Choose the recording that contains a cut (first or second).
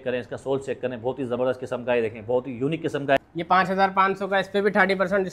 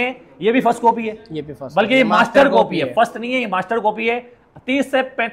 first